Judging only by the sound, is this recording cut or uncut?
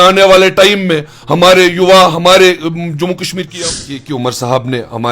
cut